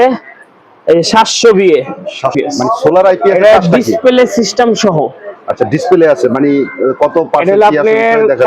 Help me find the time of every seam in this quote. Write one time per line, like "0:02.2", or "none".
0:02.3